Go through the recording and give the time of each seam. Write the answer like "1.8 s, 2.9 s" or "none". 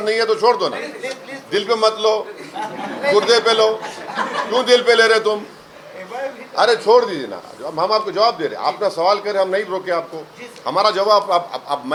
none